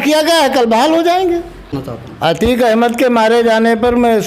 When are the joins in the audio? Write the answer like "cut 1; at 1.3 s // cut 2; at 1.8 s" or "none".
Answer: cut 1; at 1.8 s

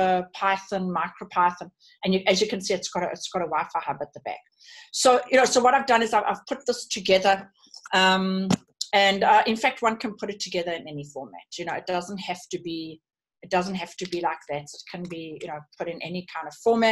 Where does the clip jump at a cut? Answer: none

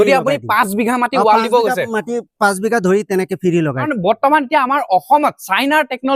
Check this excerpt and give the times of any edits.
cut 1; at 3.8 s

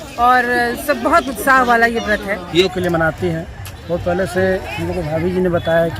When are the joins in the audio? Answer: cut 1; at 2.5 s

